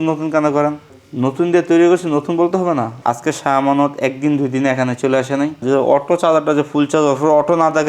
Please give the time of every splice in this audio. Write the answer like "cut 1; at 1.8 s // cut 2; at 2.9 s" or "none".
cut 1; at 3.0 s // cut 2; at 5.6 s